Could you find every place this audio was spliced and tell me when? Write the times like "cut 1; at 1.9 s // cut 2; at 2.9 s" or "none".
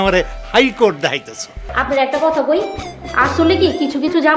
cut 1; at 1.7 s